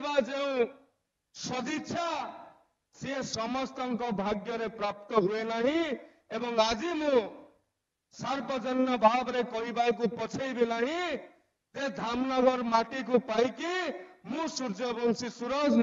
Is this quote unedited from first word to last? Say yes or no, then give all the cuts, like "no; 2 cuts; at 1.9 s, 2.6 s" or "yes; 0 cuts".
yes; 0 cuts